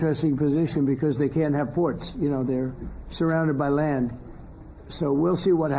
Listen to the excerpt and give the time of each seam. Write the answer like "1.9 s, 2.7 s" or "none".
2.5 s